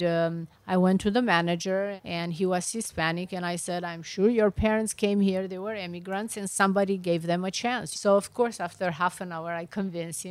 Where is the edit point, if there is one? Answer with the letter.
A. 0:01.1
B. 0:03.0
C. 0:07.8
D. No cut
C